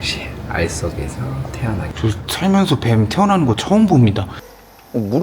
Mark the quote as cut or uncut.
cut